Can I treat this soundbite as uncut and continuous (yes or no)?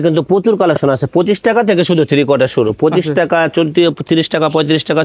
yes